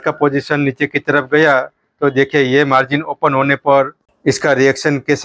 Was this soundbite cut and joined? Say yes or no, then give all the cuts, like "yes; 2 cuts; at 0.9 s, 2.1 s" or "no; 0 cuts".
yes; 1 cut; at 4.0 s